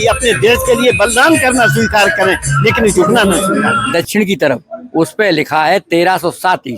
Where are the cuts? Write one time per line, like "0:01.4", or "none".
0:03.8